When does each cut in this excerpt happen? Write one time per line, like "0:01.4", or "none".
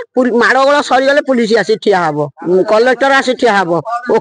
0:02.3